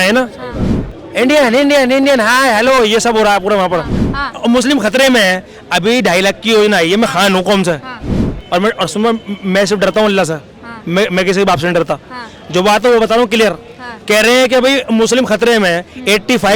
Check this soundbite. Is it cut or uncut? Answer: cut